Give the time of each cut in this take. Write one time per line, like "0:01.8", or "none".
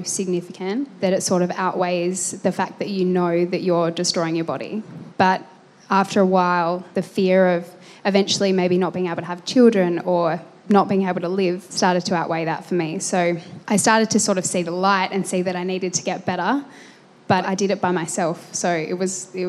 0:11.7
0:17.5